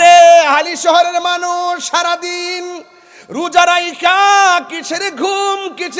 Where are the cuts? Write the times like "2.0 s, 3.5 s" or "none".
none